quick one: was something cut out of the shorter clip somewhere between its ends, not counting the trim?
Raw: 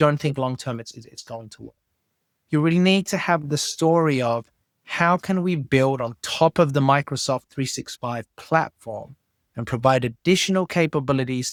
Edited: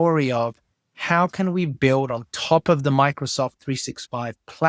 no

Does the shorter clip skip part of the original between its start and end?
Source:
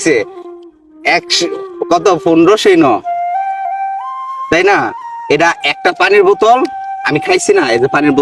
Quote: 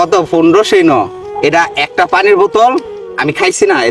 yes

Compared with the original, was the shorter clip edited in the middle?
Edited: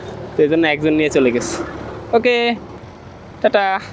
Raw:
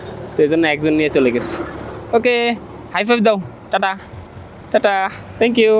yes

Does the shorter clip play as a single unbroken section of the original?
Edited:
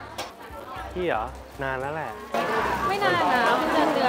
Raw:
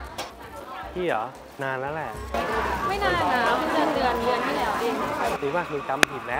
yes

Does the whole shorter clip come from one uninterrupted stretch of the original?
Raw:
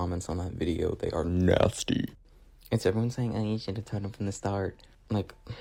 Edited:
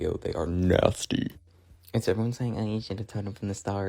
yes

